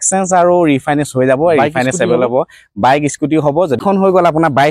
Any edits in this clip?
yes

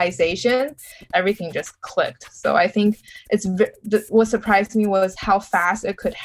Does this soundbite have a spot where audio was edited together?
yes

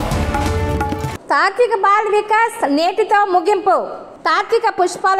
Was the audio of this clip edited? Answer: yes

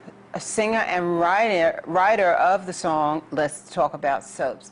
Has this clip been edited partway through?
no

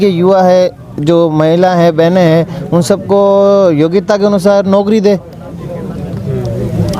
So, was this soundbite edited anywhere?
no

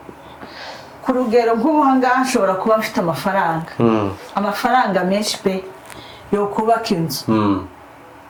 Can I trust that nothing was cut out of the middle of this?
yes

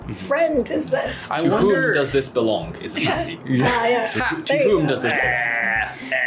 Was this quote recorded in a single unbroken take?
yes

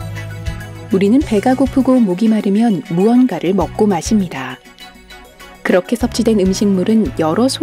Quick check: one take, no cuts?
no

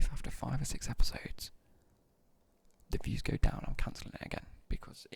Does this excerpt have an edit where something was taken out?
no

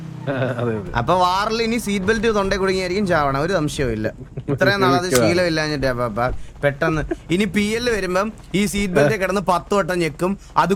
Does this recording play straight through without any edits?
yes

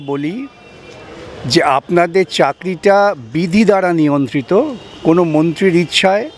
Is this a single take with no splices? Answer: yes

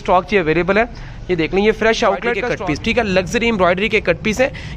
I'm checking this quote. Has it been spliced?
yes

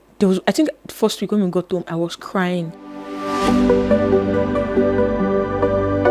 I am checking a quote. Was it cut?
yes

